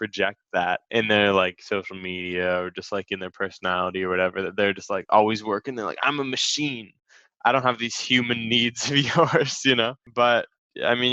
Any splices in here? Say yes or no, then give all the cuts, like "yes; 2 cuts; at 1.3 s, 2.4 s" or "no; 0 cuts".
no; 0 cuts